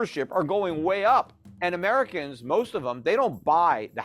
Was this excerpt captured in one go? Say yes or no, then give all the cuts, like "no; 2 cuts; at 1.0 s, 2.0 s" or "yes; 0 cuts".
no; 1 cut; at 1.4 s